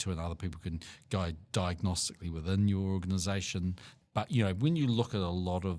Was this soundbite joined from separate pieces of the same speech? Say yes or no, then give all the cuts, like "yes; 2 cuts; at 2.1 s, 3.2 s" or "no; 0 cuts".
yes; 1 cut; at 3.9 s